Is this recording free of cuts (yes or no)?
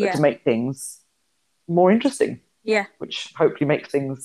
yes